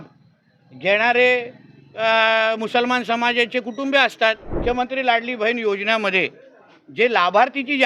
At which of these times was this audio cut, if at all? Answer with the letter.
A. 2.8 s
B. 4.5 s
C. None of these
B